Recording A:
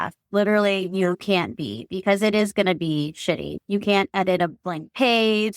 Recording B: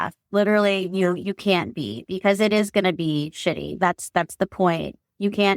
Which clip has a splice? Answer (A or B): A